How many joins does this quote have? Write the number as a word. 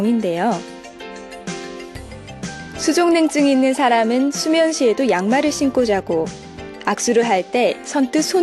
one